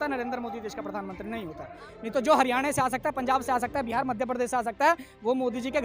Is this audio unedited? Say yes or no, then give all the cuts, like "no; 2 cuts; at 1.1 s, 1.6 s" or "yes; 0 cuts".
no; 1 cut; at 1.8 s